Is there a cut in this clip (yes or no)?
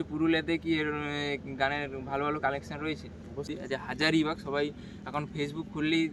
yes